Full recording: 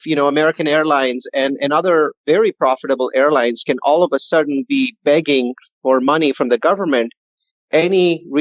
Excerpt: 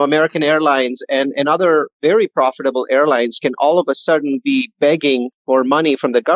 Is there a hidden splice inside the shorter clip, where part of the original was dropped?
yes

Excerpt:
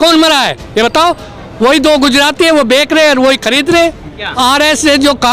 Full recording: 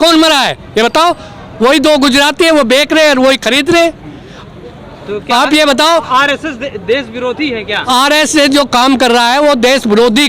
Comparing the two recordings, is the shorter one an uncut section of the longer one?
no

